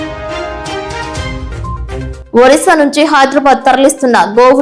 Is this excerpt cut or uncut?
cut